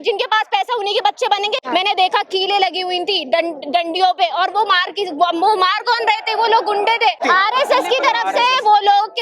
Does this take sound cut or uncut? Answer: cut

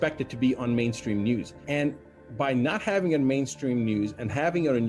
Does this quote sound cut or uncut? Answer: uncut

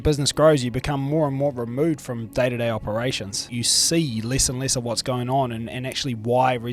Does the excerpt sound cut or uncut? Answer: cut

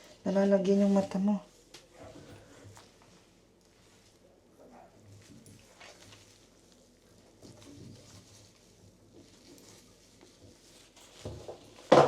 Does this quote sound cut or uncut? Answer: uncut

